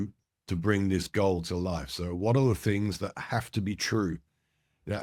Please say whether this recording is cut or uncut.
uncut